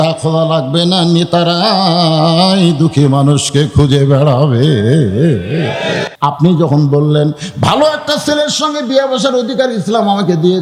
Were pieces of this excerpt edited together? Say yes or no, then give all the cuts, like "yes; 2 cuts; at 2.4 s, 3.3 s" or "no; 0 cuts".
yes; 1 cut; at 6.1 s